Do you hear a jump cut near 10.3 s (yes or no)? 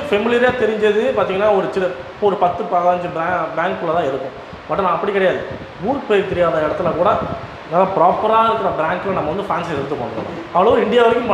yes